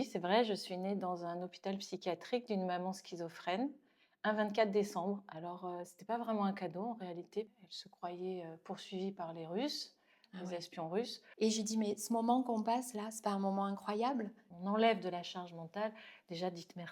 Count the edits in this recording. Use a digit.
3